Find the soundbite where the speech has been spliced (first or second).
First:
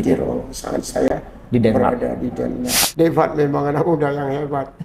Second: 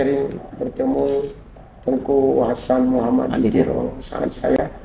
first